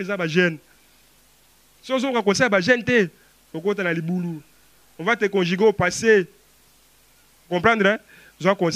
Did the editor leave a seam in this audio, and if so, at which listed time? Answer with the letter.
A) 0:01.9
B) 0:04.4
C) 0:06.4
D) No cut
D